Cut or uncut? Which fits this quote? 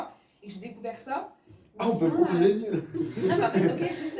uncut